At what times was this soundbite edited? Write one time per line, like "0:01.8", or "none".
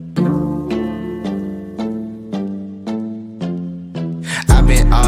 0:04.2